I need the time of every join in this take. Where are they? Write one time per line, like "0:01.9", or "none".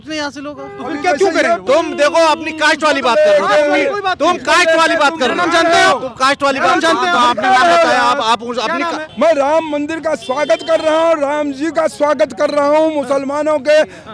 0:01.6
0:09.0